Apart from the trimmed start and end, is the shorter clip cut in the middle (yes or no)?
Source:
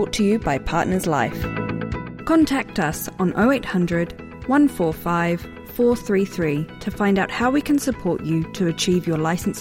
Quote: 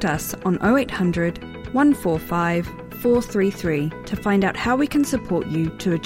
no